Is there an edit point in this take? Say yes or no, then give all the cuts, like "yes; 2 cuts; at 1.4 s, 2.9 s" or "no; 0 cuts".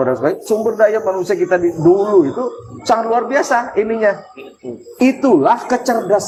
no; 0 cuts